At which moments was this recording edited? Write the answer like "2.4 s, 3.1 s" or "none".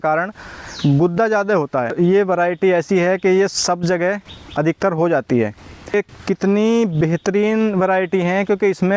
1.9 s, 5.9 s